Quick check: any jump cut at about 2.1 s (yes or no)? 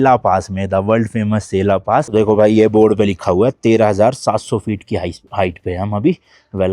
yes